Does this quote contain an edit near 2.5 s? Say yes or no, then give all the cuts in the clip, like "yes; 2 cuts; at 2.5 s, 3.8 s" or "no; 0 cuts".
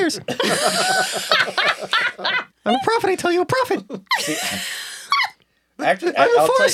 yes; 1 cut; at 2.5 s